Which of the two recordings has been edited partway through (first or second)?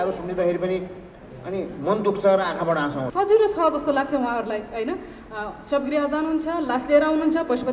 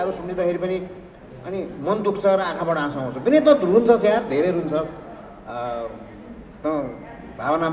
first